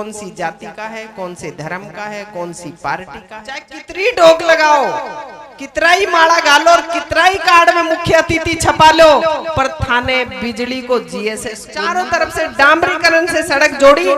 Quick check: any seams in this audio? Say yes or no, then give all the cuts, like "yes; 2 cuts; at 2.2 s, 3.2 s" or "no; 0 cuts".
yes; 2 cuts; at 3.8 s, 11.7 s